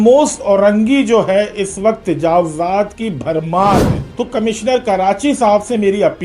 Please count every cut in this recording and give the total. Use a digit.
1